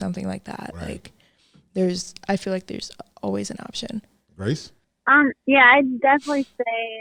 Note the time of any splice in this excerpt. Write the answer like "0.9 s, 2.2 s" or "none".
none

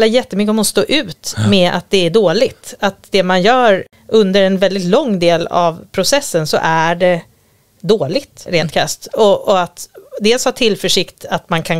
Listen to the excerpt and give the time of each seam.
3.9 s, 8.5 s

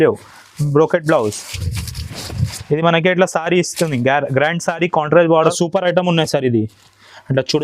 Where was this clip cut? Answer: 5.5 s

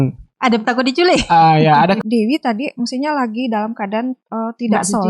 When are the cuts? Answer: 2.0 s

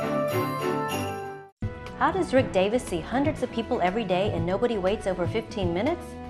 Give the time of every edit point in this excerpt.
1.2 s

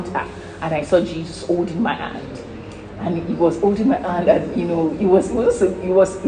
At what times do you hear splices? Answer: none

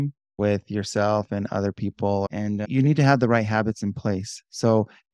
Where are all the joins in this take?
2.5 s

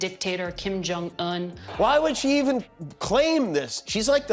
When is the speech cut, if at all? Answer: none

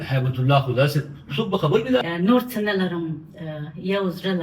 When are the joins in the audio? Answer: 2.0 s

